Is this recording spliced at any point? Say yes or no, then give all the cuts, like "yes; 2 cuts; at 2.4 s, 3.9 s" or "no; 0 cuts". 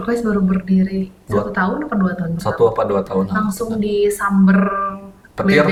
no; 0 cuts